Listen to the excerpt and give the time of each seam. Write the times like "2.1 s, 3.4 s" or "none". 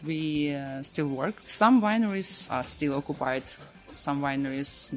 1.4 s, 2.4 s